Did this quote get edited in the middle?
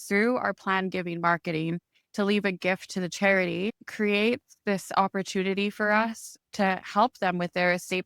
yes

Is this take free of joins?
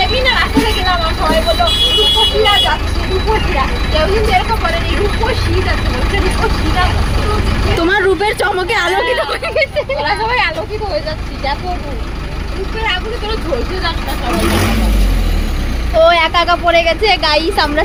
yes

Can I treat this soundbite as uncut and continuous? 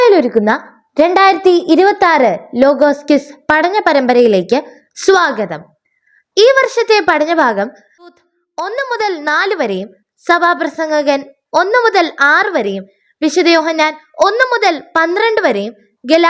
no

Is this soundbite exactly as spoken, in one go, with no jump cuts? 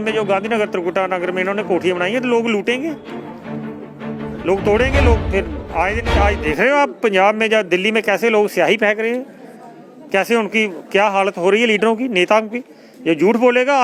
yes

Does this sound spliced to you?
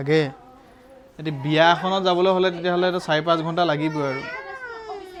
no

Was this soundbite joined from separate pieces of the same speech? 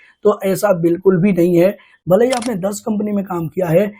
yes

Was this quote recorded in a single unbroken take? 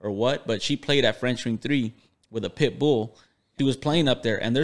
no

